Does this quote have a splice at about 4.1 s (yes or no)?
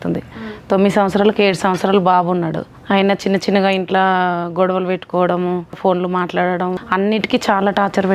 no